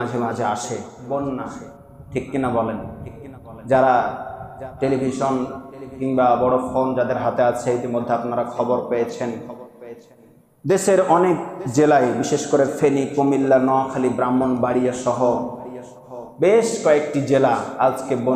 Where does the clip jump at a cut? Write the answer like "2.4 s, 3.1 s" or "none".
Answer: 0.9 s

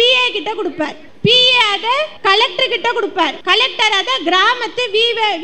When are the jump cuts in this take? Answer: 1.0 s, 2.1 s, 3.4 s

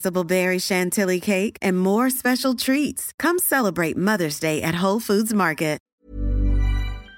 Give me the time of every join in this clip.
5.8 s

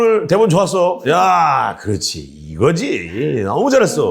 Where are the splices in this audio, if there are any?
none

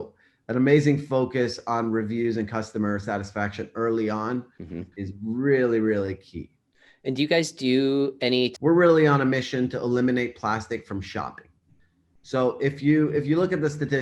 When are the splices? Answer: 8.5 s

